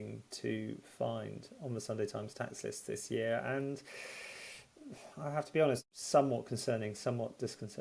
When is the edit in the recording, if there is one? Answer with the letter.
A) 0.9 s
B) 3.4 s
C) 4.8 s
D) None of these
D